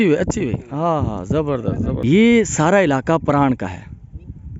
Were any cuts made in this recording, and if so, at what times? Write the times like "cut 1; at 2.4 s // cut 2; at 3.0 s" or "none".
cut 1; at 2.0 s